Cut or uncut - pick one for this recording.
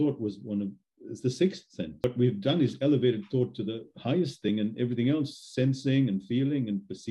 cut